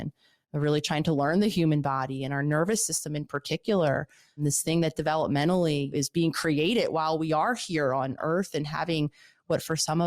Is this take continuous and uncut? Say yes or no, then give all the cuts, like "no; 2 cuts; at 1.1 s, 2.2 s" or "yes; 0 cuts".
no; 3 cuts; at 4.4 s, 5.9 s, 8.2 s